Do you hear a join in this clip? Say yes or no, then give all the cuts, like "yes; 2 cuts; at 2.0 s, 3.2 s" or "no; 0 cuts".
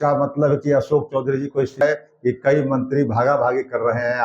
yes; 1 cut; at 1.8 s